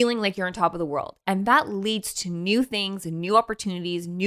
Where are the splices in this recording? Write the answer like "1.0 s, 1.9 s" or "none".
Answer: none